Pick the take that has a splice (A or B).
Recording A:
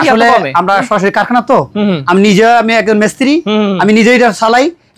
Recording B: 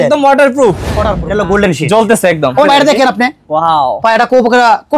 B